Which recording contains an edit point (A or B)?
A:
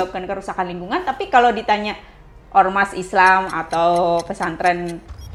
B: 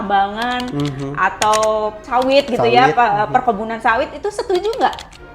B